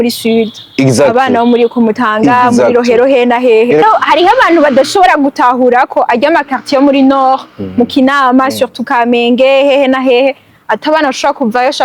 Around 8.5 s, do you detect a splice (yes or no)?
no